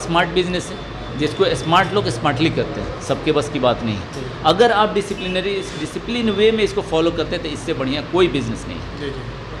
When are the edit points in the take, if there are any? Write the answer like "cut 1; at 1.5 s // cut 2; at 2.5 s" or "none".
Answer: none